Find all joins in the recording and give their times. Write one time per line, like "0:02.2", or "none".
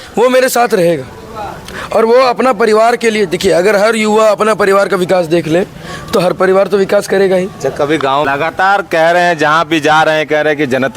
0:08.3